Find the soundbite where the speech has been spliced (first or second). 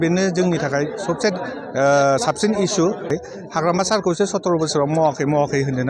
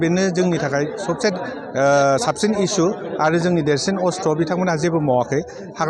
first